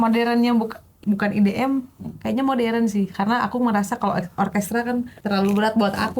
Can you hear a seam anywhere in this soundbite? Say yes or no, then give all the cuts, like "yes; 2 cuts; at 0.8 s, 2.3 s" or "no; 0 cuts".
yes; 2 cuts; at 1.0 s, 5.1 s